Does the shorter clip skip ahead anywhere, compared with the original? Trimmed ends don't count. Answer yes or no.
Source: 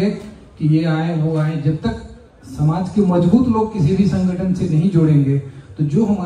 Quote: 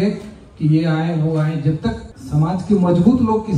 yes